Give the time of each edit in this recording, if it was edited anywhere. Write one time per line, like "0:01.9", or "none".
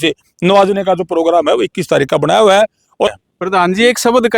0:03.1